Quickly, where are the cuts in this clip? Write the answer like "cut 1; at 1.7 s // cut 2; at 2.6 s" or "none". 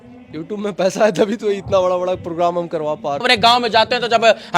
cut 1; at 3.2 s